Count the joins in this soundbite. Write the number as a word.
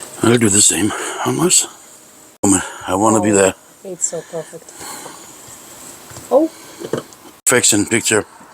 two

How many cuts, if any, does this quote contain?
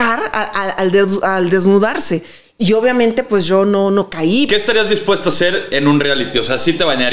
one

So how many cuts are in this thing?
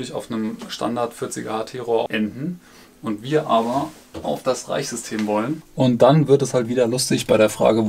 two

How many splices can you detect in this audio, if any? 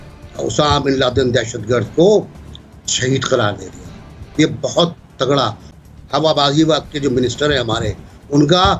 one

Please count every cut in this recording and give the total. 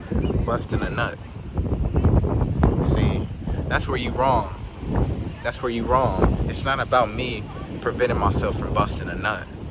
zero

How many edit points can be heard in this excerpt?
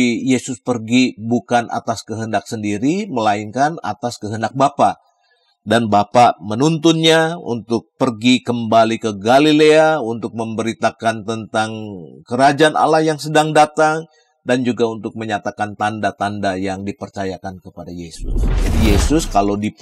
one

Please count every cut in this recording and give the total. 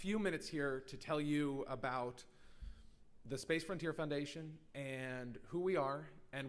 zero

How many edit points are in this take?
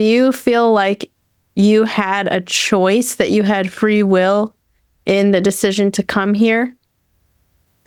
zero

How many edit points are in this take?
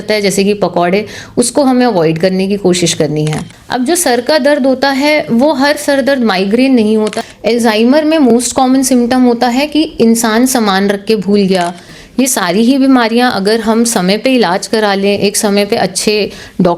three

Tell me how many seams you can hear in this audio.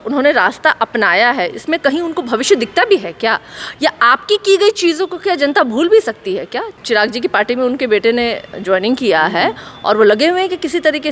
one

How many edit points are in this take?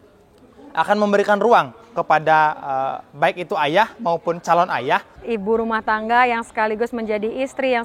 one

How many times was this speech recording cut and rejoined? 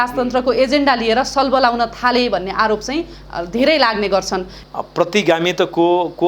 one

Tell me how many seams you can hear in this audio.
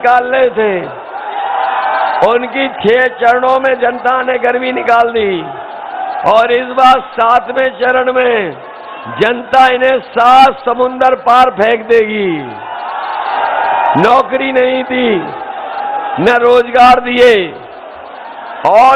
one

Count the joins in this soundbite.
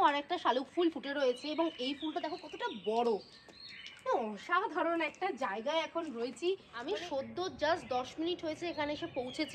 one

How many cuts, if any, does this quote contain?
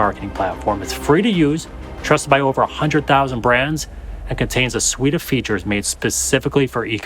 zero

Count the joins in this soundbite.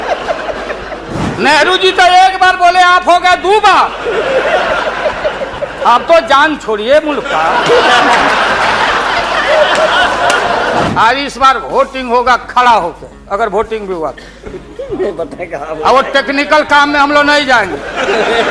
two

